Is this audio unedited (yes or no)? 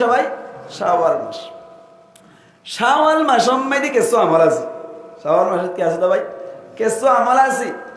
yes